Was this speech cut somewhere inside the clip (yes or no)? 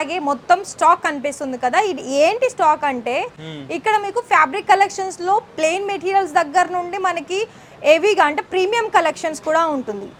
no